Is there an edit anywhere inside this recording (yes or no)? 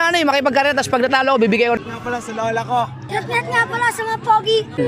yes